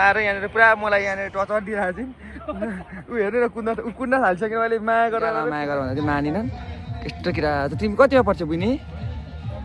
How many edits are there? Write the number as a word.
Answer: one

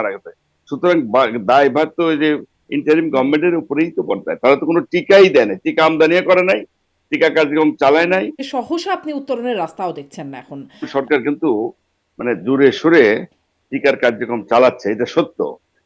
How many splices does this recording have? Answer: two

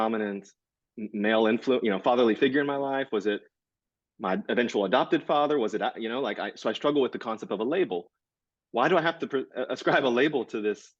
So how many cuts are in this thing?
zero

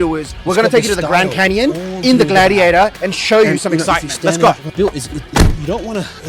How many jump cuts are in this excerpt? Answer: one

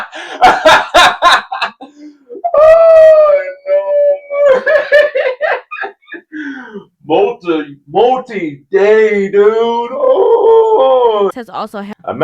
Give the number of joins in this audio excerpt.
one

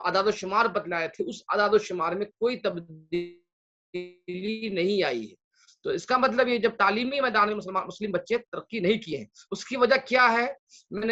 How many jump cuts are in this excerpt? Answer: zero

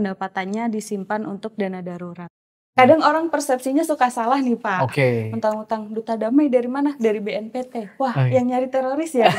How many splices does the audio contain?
one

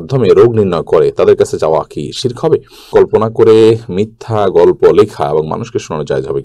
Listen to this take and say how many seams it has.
one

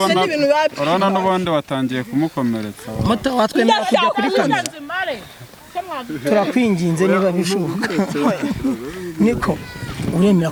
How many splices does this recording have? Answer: zero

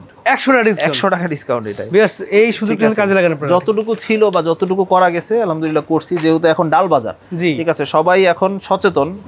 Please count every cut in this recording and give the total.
zero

